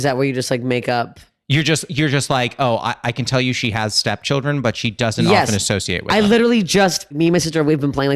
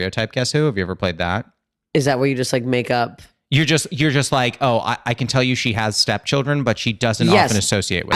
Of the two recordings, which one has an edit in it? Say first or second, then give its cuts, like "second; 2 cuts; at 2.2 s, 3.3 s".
first; 1 cut; at 7.1 s